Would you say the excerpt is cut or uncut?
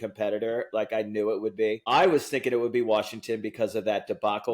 cut